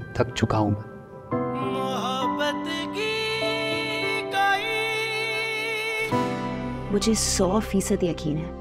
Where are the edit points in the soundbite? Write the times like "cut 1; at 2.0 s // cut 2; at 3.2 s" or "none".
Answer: cut 1; at 6.8 s